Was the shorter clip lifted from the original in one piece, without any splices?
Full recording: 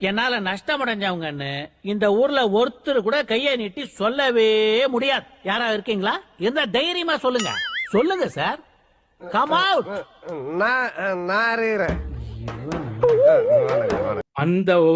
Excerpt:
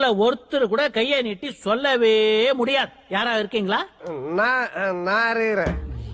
no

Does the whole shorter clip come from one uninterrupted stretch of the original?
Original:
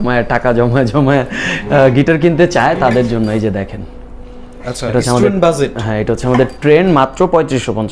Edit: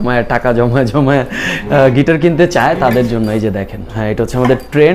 no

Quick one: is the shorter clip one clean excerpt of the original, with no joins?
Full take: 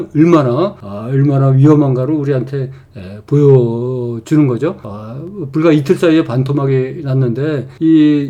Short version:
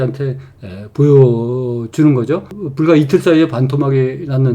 no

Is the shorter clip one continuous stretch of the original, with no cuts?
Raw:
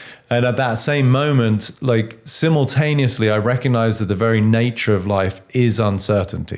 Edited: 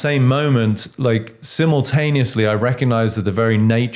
yes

